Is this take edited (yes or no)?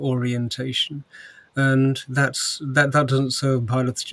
no